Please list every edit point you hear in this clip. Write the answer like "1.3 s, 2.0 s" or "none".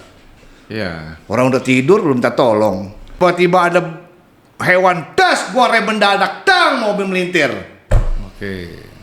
3.2 s